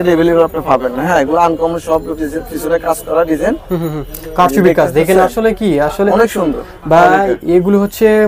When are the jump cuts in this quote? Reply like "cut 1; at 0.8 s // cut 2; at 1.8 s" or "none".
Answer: none